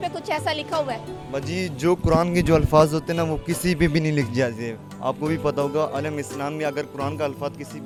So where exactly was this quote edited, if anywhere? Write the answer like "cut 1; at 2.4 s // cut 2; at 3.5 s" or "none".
none